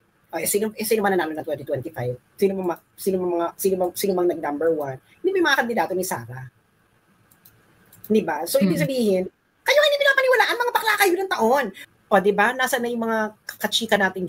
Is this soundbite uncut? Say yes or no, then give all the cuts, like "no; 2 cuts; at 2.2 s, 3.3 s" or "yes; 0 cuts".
no; 1 cut; at 11.8 s